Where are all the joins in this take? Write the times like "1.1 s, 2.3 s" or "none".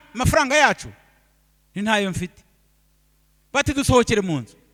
none